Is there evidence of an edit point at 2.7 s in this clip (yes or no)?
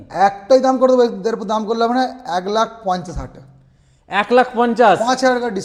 no